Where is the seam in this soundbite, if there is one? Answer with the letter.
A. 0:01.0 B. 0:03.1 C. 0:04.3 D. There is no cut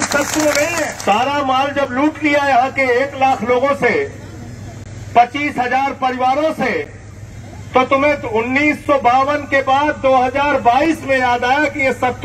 A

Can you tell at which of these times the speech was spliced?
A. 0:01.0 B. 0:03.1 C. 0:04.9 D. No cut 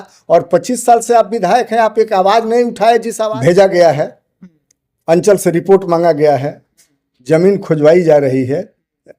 B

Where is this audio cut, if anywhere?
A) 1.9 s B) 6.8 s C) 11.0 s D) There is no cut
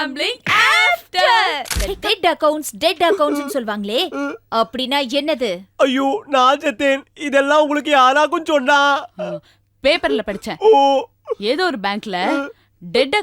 A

